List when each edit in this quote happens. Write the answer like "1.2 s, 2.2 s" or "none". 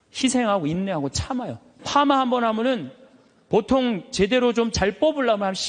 1.6 s